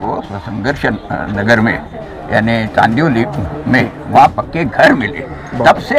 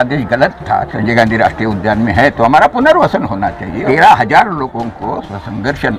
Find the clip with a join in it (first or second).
second